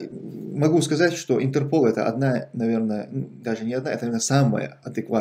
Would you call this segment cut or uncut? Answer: uncut